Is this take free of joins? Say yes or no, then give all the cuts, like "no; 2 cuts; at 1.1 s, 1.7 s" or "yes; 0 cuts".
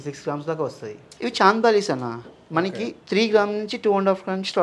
no; 1 cut; at 1.0 s